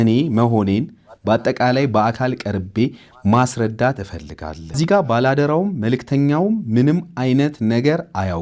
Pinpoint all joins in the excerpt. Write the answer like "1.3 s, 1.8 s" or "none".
4.8 s